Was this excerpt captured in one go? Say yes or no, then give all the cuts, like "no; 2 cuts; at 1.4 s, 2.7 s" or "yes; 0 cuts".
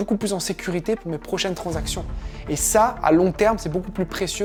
yes; 0 cuts